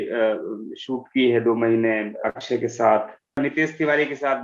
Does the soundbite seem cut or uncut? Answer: cut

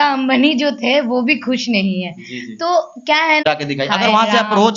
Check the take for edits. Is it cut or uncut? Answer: cut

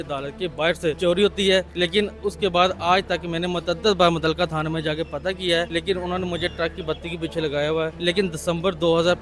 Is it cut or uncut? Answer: cut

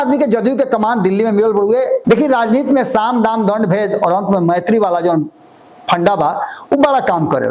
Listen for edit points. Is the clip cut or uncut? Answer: cut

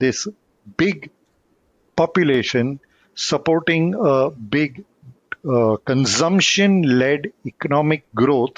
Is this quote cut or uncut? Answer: uncut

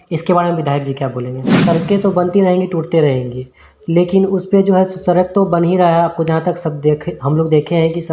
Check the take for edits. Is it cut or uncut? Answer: cut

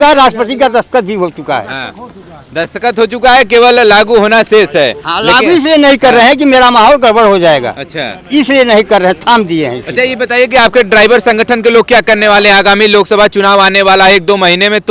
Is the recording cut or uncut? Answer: uncut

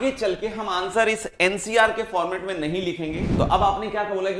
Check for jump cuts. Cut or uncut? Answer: cut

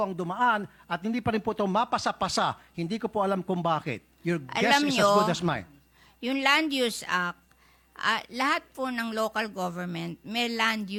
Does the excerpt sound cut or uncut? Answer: uncut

